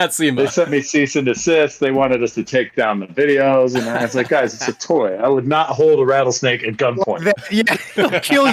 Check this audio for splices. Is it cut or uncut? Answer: uncut